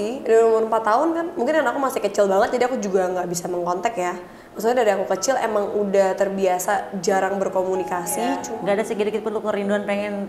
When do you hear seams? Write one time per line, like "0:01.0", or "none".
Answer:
0:08.5

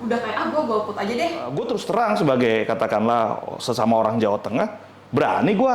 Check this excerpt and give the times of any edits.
0:01.6

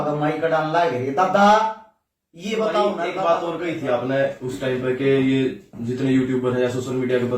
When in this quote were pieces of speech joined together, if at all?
0:03.1

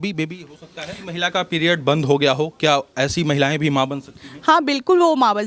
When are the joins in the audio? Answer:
0:01.0

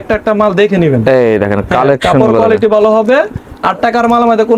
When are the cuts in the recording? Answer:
none

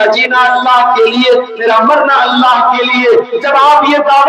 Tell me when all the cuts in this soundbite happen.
none

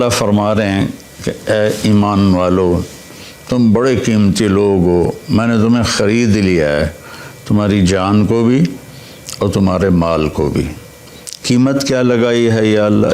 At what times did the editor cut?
none

